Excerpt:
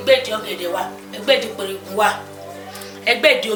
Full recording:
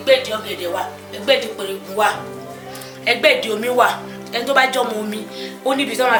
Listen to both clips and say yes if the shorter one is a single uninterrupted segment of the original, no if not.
yes